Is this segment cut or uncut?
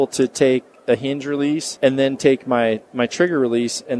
cut